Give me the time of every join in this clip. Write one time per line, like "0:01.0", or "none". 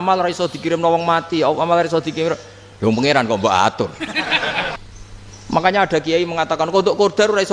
0:04.8